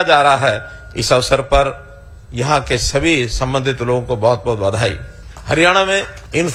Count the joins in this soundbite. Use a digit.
0